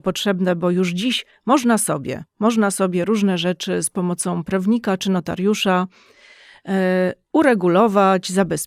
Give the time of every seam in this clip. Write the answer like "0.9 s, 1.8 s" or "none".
none